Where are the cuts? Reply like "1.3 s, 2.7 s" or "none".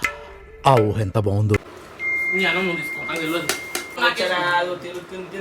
1.6 s